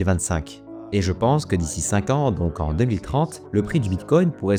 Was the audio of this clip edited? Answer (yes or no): no